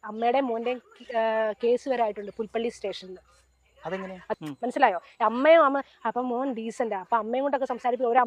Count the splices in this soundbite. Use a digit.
1